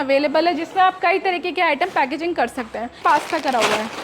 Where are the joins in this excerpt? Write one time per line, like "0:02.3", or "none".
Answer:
0:03.0